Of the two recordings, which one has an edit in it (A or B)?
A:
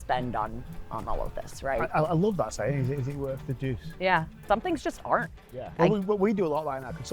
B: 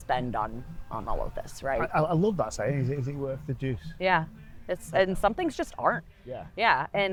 A